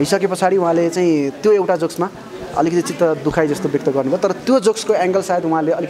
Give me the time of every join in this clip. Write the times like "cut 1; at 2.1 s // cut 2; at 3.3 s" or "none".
none